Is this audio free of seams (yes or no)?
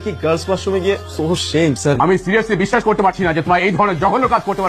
no